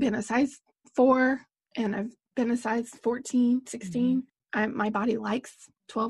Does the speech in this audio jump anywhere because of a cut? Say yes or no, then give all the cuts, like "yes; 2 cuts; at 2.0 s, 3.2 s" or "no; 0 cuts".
yes; 2 cuts; at 2.2 s, 4.4 s